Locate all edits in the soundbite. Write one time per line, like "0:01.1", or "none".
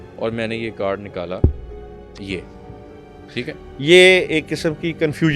none

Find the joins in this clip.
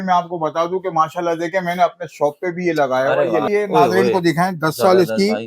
0:03.5

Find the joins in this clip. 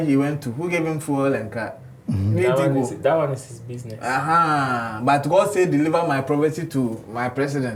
none

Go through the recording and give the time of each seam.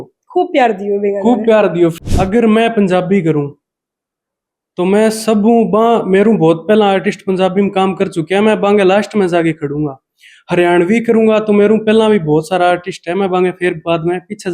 0:01.9

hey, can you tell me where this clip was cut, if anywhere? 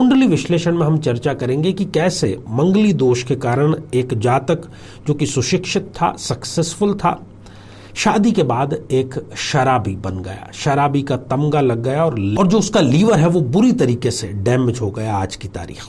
none

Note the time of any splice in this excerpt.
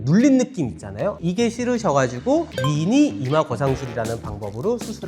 0:01.2
0:02.5

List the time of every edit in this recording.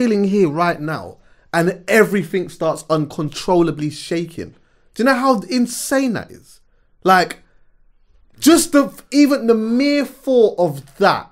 none

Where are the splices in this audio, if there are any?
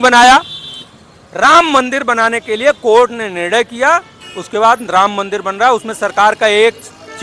none

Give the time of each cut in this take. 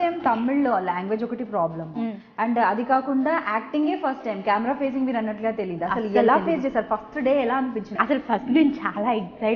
0:08.0

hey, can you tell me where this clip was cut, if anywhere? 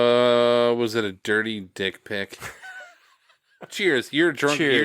0:03.7

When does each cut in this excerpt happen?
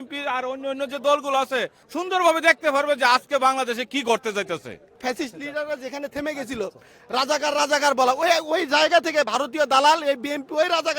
0:01.8
0:05.0

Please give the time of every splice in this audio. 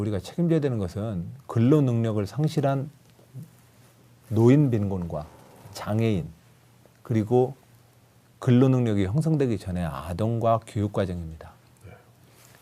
0:03.8

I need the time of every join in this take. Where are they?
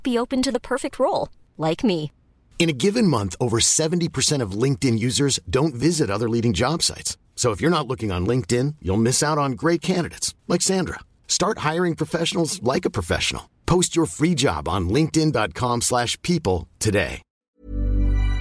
0:17.4

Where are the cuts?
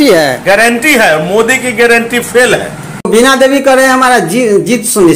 0:03.1

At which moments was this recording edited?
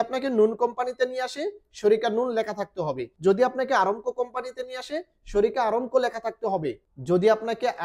0:03.1
0:06.9

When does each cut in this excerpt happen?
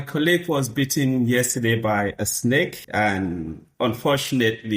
0:02.8

